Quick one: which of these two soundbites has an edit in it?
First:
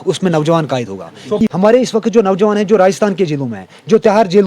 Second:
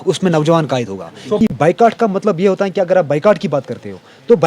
first; 1 cut; at 1.5 s

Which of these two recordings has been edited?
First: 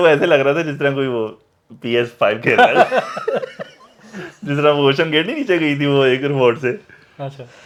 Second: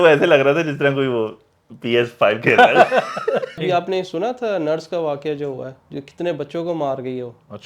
second; 1 cut; at 3.6 s

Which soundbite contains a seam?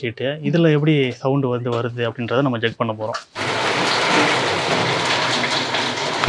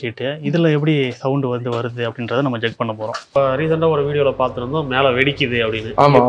second; 1 cut; at 3.4 s

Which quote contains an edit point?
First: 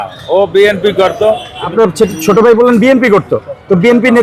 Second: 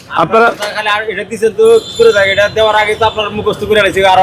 first; 1 cut; at 1.7 s

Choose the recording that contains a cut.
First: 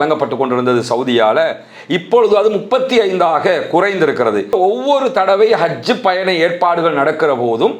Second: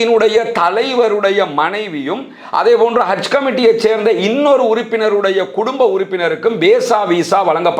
first; 1 cut; at 4.5 s

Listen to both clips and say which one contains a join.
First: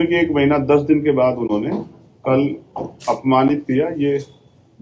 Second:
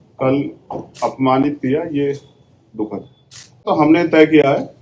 second; 1 cut; at 3.7 s

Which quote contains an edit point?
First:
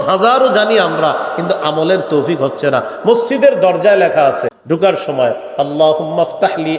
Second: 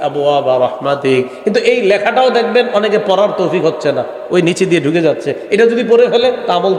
first; 1 cut; at 4.6 s

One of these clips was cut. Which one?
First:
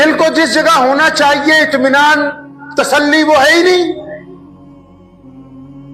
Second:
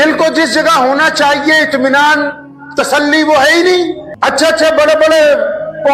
second; 1 cut; at 4.0 s

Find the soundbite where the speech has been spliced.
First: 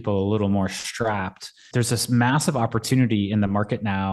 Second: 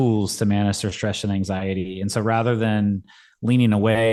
first; 1 cut; at 1.6 s

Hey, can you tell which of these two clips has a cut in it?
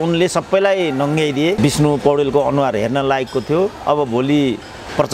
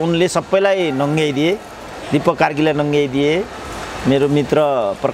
first; 1 cut; at 1.6 s

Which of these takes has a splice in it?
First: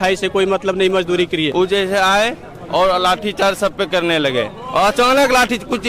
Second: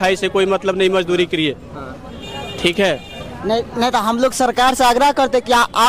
first; 1 cut; at 1.5 s

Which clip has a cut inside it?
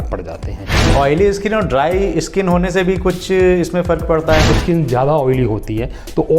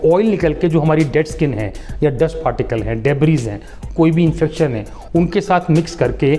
first; 2 cuts; at 0.9 s, 4.5 s

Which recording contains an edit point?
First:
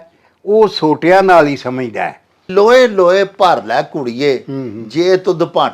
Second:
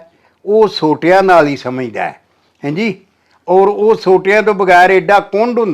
first; 1 cut; at 2.5 s

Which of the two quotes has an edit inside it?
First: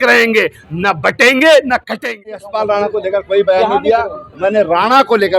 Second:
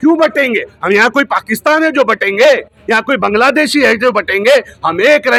first; 1 cut; at 2.4 s

